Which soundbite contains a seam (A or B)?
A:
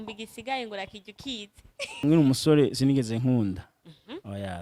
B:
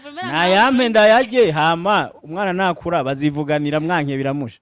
A